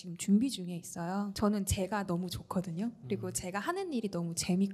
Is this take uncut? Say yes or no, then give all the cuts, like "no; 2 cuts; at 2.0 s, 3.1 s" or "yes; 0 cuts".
no; 1 cut; at 1.3 s